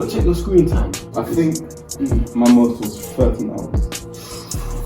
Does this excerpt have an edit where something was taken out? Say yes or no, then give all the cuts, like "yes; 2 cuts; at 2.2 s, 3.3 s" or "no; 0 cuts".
yes; 1 cut; at 1.2 s